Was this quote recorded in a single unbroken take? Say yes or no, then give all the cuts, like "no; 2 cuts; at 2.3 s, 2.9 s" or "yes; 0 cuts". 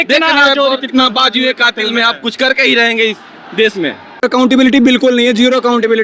no; 1 cut; at 4.2 s